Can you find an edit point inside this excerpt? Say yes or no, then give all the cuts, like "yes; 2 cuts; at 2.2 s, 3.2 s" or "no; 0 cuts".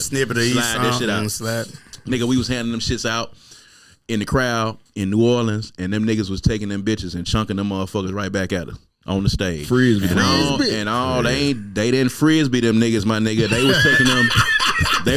no; 0 cuts